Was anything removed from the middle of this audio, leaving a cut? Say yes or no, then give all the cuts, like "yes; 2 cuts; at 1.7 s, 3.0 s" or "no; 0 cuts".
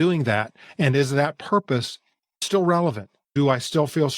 yes; 2 cuts; at 2.4 s, 3.3 s